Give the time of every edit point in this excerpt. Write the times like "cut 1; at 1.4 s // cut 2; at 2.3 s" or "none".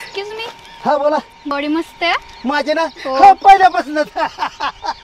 cut 1; at 1.5 s